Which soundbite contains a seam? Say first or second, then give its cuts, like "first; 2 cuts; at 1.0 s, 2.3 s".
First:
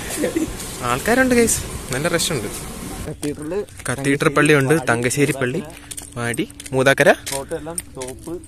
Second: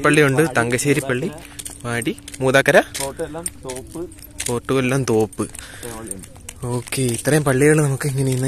first; 1 cut; at 2.9 s